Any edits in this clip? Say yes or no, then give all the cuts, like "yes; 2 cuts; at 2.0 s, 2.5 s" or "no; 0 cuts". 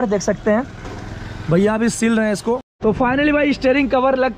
yes; 1 cut; at 2.7 s